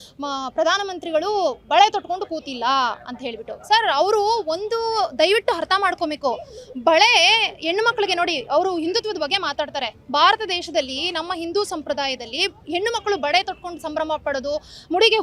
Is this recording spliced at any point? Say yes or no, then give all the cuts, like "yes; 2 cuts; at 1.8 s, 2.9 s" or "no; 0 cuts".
no; 0 cuts